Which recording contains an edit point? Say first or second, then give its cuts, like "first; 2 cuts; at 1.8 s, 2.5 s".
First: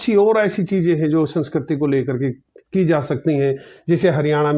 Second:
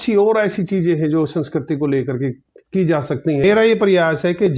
second; 1 cut; at 3.4 s